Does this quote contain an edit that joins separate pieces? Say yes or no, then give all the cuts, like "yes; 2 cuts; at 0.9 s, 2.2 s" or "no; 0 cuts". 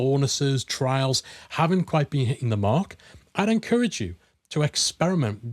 no; 0 cuts